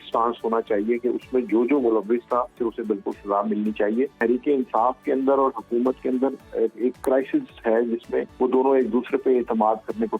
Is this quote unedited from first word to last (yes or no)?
no